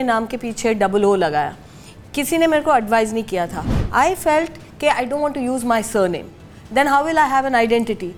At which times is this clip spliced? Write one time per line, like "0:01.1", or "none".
none

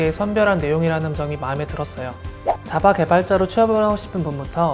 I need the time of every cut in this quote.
0:02.3

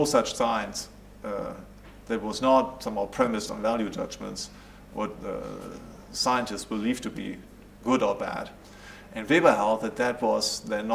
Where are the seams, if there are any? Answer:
0:02.8

